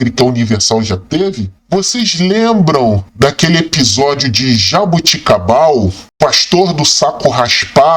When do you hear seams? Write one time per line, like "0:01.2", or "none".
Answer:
0:01.5